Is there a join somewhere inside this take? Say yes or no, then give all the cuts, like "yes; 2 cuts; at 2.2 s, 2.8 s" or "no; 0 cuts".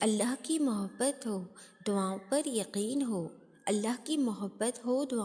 no; 0 cuts